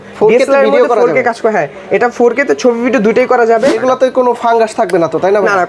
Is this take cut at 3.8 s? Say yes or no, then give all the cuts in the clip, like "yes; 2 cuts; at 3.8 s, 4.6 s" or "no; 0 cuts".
yes; 1 cut; at 3.8 s